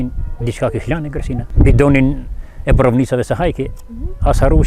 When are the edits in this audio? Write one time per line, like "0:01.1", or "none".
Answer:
0:01.5